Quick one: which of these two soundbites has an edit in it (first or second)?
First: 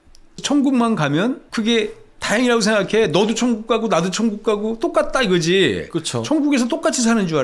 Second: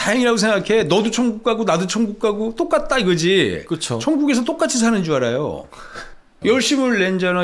second